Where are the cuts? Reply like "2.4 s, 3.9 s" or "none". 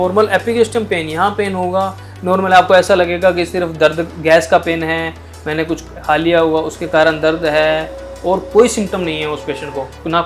none